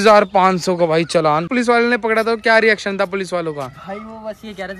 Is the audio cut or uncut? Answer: cut